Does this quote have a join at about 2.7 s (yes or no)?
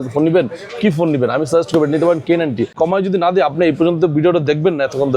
yes